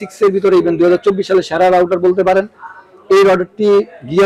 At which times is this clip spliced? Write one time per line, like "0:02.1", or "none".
none